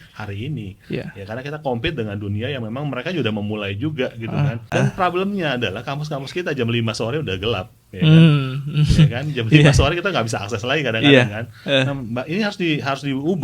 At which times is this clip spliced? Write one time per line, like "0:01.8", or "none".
0:04.7